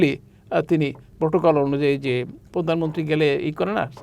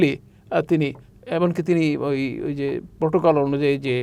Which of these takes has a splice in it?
first; 2 cuts; at 1.1 s, 2.4 s

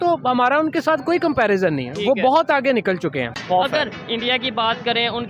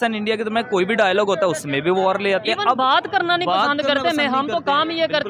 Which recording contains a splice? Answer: first; 1 cut; at 3.4 s

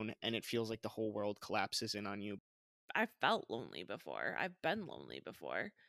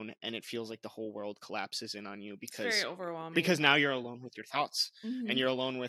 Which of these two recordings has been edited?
first; 1 cut; at 2.6 s

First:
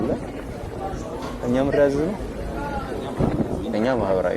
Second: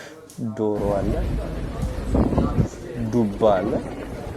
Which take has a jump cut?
first; 2 cuts; at 2.3 s, 3.6 s

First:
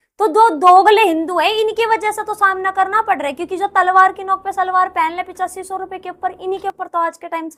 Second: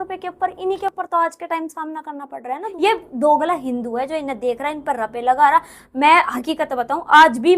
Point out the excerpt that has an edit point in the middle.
second; 1 cut; at 2.7 s

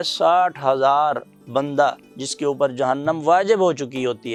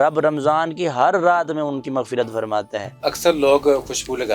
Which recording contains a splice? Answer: second; 1 cut; at 2.9 s

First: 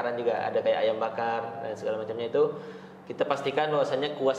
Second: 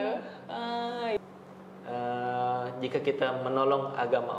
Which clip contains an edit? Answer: second; 1 cut; at 1.2 s

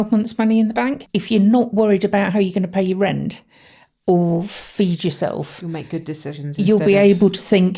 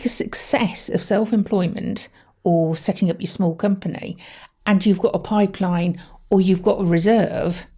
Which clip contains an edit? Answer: first; 2 cuts; at 1.1 s, 6.4 s

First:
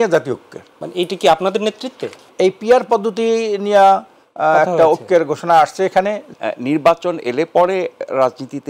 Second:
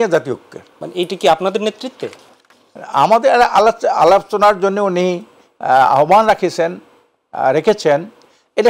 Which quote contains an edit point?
first; 2 cuts; at 2.3 s, 6.3 s

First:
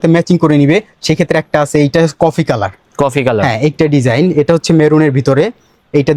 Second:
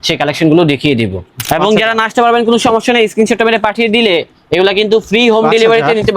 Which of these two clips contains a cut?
second; 1 cut; at 1.5 s

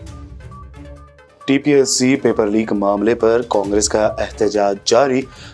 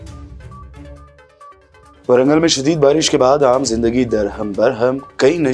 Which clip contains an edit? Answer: first; 1 cut; at 1.0 s

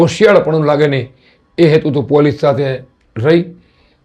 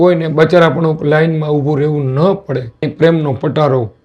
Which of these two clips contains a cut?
second; 1 cut; at 2.9 s

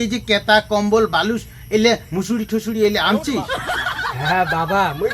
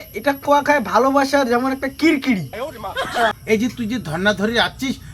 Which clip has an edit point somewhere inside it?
second; 1 cut; at 3.3 s

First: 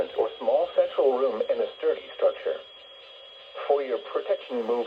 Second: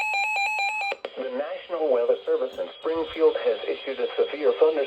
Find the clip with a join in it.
second; 1 cut; at 0.9 s

